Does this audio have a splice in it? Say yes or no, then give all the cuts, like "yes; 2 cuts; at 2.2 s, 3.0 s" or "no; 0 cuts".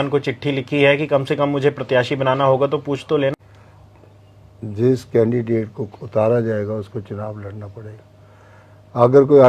yes; 1 cut; at 3.3 s